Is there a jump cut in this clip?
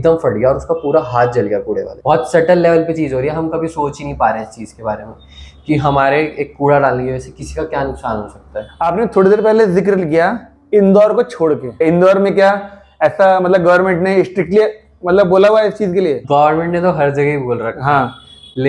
no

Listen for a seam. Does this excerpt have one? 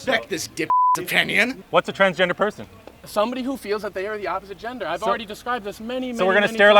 yes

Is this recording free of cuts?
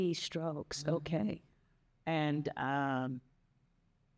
yes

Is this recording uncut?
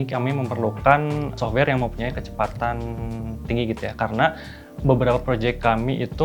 yes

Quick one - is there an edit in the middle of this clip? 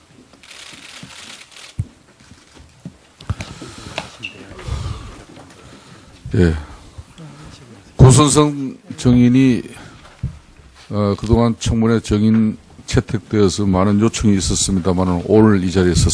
no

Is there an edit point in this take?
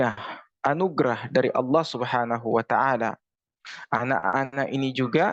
no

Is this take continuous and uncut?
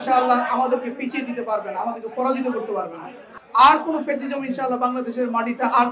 no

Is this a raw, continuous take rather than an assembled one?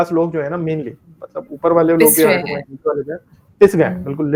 yes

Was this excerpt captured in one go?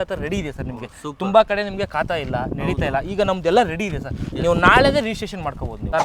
yes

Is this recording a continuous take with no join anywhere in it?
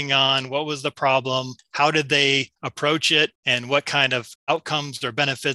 no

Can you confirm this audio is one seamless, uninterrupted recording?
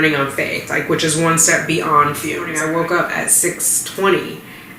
no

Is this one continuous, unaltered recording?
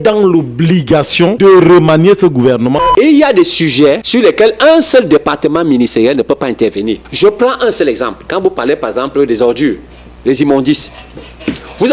no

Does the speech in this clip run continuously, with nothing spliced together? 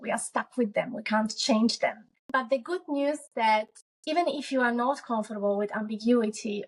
no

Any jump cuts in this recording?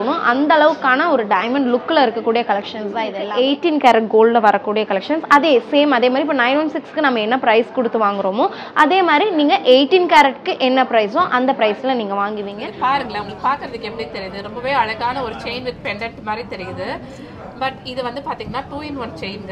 yes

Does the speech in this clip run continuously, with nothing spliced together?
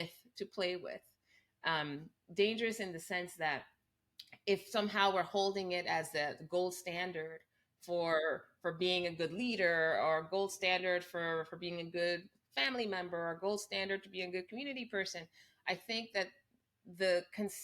yes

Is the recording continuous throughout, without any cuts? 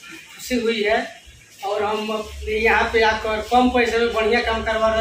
yes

